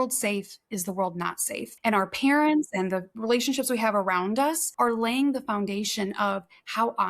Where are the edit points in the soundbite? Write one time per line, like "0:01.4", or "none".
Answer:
0:01.7
0:04.6

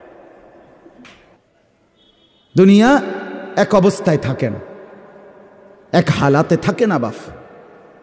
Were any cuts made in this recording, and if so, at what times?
0:01.5

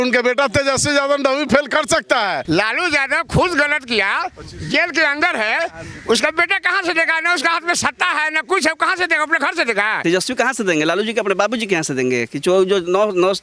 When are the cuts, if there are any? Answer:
0:02.4
0:10.0

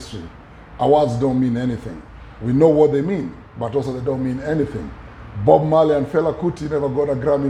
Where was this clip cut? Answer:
none

